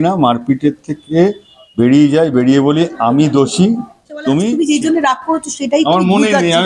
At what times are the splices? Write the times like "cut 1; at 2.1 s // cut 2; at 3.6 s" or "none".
cut 1; at 4.2 s